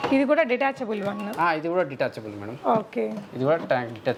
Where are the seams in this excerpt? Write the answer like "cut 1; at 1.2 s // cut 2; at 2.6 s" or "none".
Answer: none